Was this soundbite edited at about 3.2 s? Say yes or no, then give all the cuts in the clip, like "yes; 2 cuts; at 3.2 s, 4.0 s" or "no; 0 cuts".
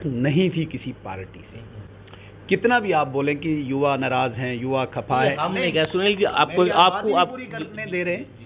no; 1 cut; at 1.9 s